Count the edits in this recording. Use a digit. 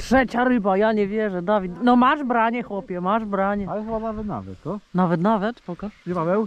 0